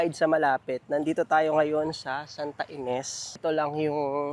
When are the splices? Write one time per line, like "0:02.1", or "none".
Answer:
0:03.4